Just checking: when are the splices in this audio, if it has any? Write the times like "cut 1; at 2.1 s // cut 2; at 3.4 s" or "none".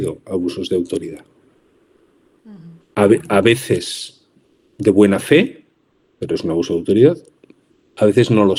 none